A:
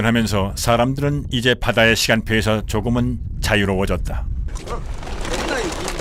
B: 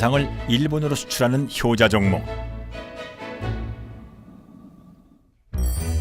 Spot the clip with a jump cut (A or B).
B